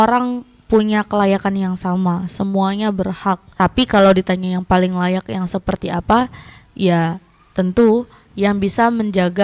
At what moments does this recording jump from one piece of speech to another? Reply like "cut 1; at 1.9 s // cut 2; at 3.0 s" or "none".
cut 1; at 3.5 s